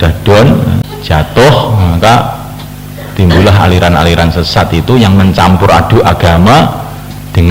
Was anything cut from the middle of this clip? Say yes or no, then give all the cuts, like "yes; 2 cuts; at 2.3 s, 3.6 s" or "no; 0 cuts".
yes; 1 cut; at 0.9 s